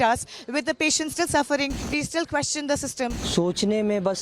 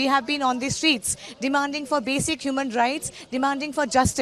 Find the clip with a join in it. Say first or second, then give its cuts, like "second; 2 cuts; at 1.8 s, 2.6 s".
first; 2 cuts; at 1.8 s, 3.2 s